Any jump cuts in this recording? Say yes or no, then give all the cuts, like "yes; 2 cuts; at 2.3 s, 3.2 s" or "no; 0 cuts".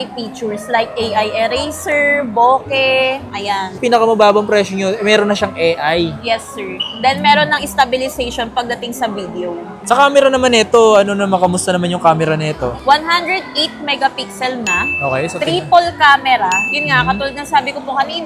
no; 0 cuts